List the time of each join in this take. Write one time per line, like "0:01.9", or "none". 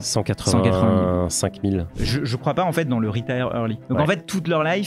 0:01.9
0:03.8